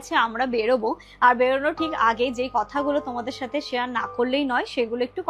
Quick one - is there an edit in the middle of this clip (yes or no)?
no